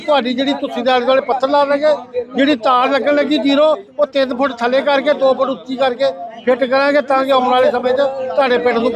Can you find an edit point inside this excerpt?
no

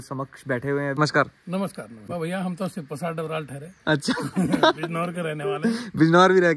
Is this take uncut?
no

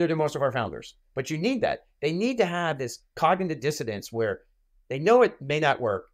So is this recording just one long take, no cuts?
yes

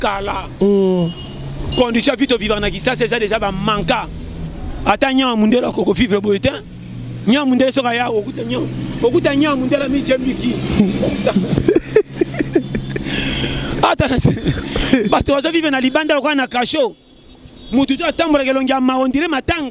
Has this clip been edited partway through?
no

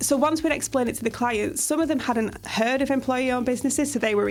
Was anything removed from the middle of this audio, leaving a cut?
no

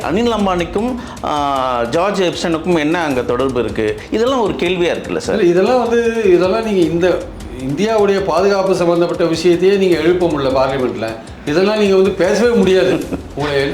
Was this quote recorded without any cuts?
yes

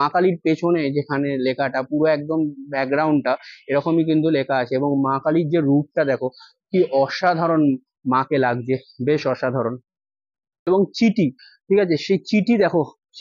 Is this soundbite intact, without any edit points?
no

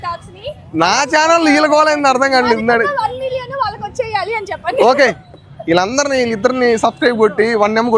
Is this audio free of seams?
yes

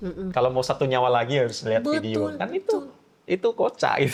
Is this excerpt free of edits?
yes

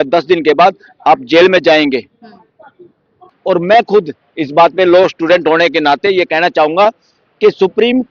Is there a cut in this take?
yes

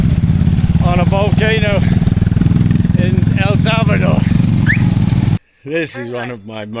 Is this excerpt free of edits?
no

